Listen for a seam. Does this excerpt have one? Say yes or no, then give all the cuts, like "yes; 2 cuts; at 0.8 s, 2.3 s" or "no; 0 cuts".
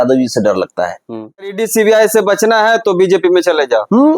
yes; 1 cut; at 1.6 s